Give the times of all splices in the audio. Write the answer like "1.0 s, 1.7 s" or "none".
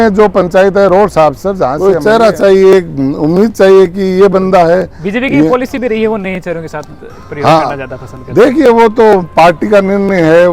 1.8 s